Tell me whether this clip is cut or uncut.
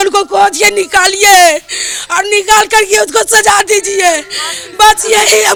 uncut